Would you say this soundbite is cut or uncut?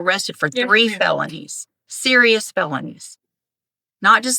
uncut